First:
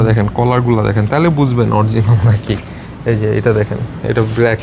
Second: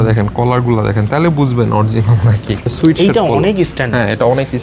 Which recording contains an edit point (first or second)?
second